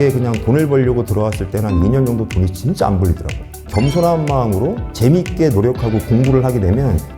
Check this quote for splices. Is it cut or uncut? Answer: cut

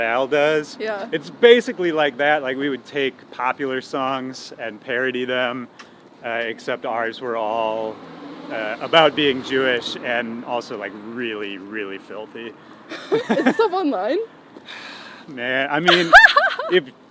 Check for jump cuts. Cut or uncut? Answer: uncut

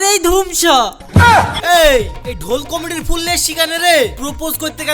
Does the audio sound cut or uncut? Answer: cut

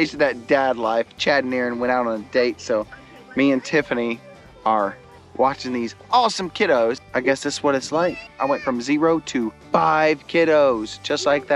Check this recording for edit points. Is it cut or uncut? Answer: uncut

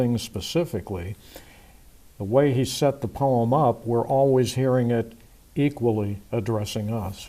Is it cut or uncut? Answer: cut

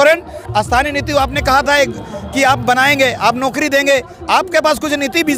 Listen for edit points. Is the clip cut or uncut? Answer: uncut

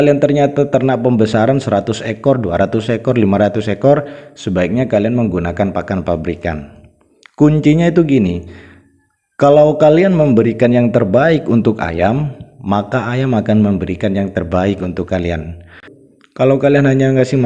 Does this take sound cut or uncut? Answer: cut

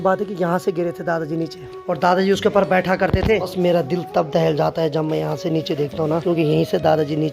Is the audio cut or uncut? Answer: cut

